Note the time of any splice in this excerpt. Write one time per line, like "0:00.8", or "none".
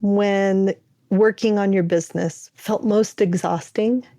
0:02.4